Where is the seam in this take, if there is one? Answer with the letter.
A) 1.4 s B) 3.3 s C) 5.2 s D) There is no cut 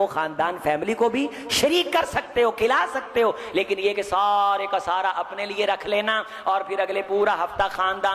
D